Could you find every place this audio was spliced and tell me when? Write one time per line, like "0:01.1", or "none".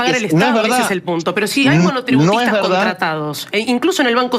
none

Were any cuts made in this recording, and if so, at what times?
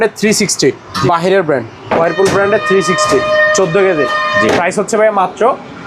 0:02.0

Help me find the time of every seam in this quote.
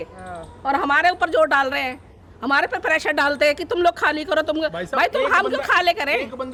none

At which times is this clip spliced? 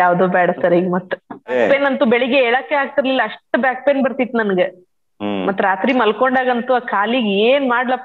0:01.5

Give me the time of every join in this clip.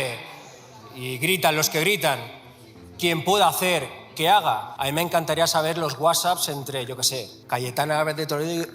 0:04.7
0:07.3

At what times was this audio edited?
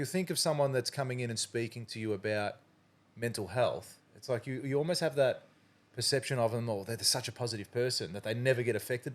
none

